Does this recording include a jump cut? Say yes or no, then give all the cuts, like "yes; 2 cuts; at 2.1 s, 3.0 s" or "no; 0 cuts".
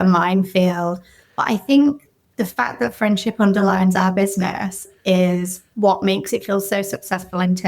no; 0 cuts